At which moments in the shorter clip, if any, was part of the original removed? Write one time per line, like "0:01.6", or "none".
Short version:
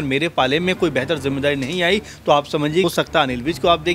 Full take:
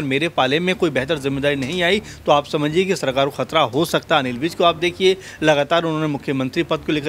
0:02.8